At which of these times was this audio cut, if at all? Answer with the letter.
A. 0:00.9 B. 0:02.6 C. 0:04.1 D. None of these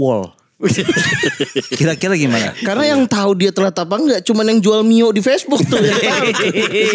B